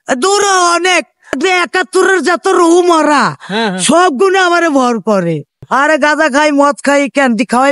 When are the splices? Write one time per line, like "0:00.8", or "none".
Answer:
0:01.4
0:05.7